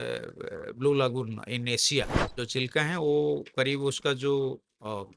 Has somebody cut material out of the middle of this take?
yes; 1 cut; at 2.2 s

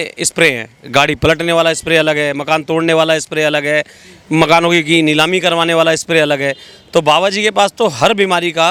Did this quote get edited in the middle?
no; 0 cuts

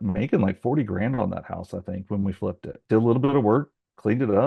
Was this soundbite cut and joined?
yes; 1 cut; at 2.7 s

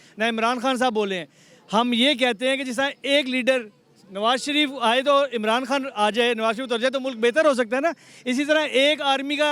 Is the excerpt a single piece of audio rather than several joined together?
yes; 0 cuts

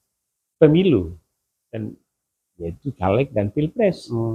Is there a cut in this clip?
no; 0 cuts

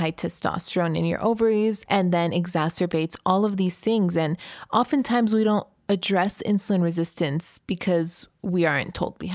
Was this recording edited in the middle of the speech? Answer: yes; 1 cut; at 1.8 s

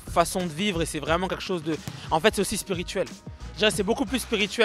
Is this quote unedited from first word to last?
yes; 0 cuts

